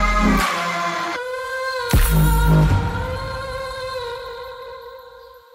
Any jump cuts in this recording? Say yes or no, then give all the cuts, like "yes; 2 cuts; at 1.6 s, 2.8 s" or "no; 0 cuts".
no; 0 cuts